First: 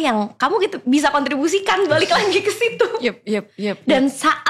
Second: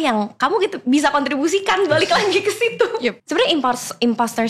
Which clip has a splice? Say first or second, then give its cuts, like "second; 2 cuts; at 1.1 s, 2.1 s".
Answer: second; 1 cut; at 3.2 s